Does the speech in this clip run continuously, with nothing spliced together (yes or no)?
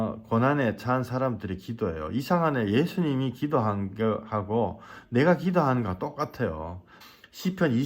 no